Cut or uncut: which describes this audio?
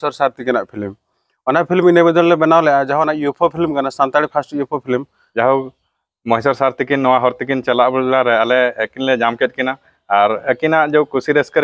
cut